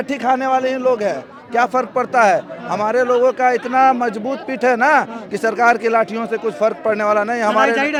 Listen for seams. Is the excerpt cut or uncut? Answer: uncut